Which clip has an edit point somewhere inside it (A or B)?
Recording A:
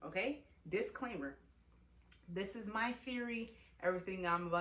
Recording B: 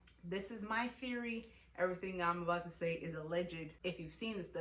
B